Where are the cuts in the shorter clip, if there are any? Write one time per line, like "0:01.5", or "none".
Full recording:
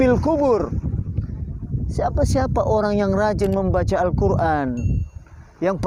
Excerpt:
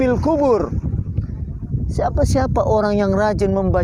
none